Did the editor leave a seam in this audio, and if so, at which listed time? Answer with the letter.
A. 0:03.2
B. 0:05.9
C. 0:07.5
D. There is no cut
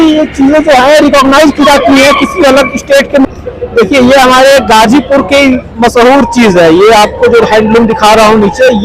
A